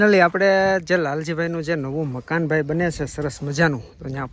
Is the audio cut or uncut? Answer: uncut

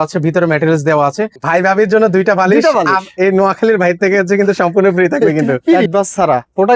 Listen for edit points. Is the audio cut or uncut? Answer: cut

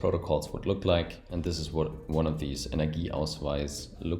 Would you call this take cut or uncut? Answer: cut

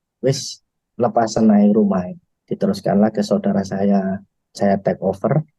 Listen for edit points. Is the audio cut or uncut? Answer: uncut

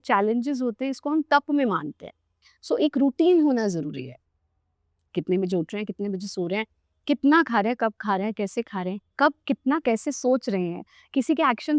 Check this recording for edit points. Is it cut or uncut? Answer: uncut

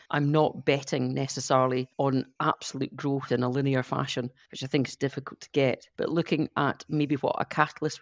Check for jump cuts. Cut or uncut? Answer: cut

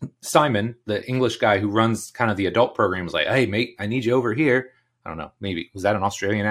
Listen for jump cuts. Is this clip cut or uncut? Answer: uncut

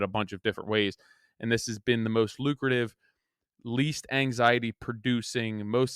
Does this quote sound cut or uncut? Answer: uncut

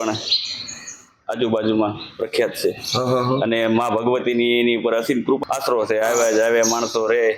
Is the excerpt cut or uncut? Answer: cut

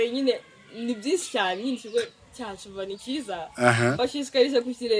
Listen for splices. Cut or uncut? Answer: uncut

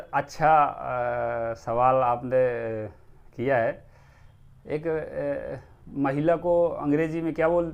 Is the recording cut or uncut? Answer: uncut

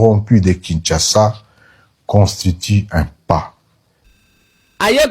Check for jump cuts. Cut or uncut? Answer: cut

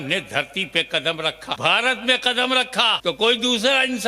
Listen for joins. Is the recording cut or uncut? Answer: cut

